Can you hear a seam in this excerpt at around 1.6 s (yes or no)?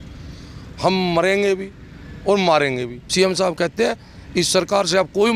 no